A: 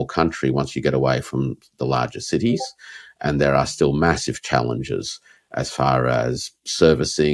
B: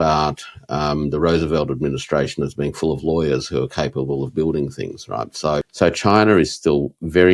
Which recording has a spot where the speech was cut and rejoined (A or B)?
B